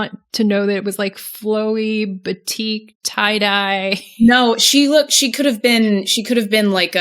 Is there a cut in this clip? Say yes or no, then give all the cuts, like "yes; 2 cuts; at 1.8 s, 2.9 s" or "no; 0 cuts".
no; 0 cuts